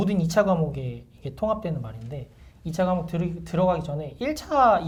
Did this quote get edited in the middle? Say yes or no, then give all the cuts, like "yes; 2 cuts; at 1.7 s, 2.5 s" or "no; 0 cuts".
no; 0 cuts